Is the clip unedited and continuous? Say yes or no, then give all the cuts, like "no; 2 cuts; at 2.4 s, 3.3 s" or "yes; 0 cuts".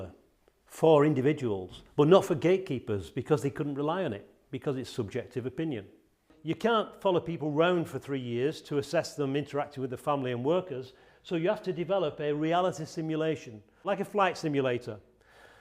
no; 2 cuts; at 6.3 s, 13.8 s